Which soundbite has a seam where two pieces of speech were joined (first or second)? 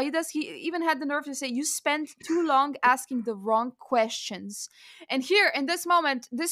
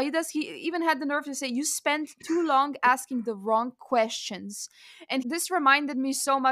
second